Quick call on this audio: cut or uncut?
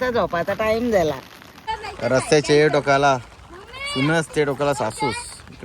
cut